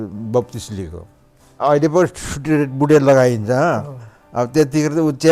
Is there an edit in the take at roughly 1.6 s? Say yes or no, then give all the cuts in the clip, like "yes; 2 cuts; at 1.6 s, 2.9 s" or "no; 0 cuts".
yes; 1 cut; at 1.6 s